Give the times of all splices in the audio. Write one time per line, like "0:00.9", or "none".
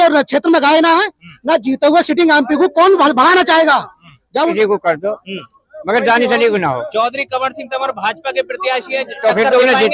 0:04.5